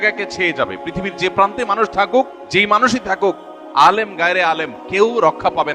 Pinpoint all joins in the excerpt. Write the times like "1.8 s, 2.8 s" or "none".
2.4 s